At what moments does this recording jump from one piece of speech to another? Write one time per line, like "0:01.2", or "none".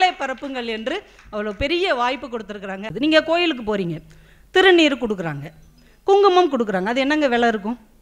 0:02.9